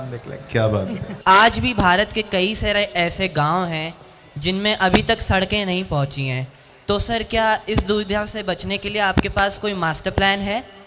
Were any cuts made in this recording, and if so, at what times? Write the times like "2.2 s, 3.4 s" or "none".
1.2 s